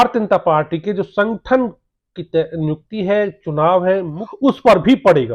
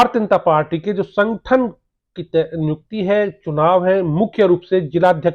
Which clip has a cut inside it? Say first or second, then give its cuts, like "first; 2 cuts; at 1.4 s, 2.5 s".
first; 1 cut; at 4.2 s